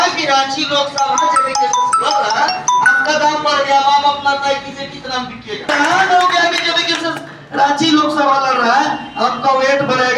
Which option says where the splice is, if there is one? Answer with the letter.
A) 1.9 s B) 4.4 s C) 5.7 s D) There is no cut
C